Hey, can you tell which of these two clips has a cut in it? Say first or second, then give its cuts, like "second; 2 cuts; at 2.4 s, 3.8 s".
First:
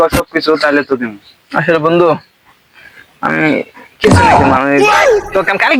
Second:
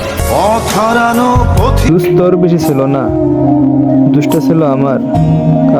second; 1 cut; at 1.9 s